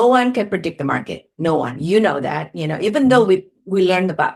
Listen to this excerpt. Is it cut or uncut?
uncut